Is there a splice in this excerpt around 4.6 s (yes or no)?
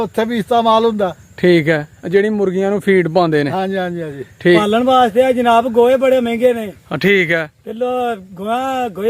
yes